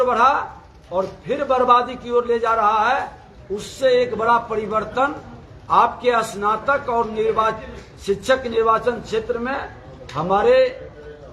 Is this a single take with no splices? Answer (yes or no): yes